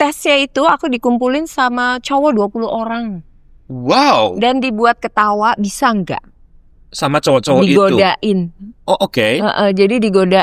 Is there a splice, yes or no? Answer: no